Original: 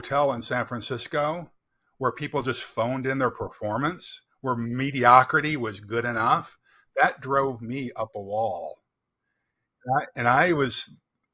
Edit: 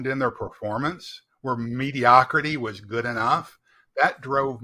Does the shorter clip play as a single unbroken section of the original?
yes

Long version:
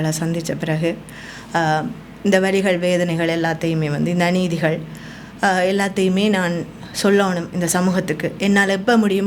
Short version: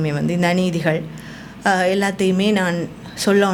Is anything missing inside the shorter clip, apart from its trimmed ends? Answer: no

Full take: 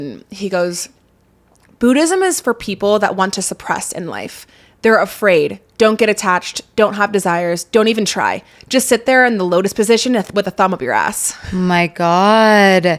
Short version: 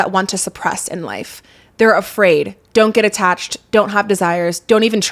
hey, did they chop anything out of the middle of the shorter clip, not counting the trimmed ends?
no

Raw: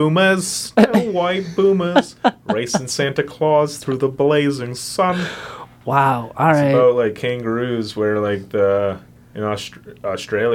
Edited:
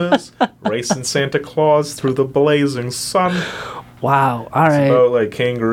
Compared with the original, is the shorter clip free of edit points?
yes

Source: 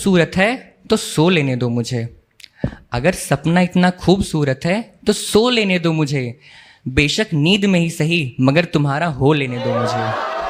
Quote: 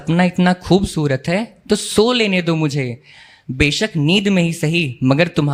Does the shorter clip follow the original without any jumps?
yes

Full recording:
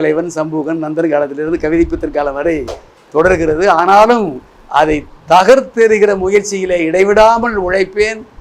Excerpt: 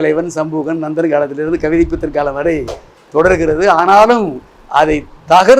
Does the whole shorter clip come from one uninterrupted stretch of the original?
yes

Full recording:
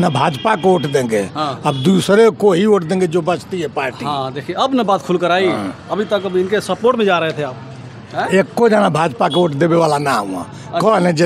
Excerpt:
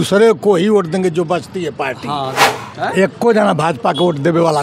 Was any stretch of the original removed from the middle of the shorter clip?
yes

